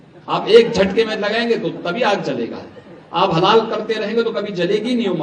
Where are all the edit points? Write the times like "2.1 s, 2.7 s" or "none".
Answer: none